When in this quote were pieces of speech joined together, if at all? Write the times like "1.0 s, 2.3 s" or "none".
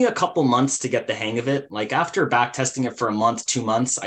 1.7 s